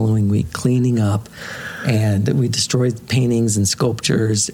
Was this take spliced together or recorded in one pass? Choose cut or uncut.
uncut